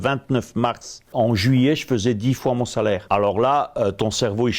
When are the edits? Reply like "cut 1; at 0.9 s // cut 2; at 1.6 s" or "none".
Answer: cut 1; at 1.1 s // cut 2; at 3.0 s